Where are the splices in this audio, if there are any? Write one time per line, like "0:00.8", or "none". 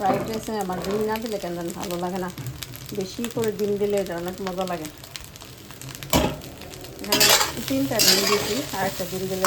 none